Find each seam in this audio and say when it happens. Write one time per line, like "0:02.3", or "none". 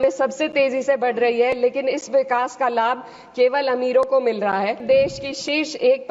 0:04.8

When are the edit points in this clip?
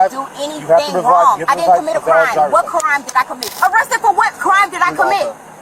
0:03.4

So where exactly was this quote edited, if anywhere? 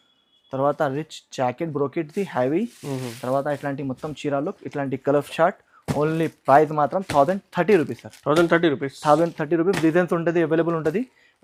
none

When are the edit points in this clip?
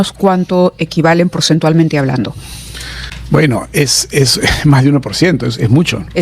none

